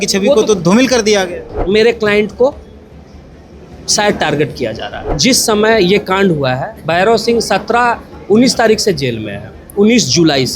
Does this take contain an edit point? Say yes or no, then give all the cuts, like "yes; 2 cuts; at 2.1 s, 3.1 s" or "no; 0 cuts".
yes; 2 cuts; at 1.6 s, 5.1 s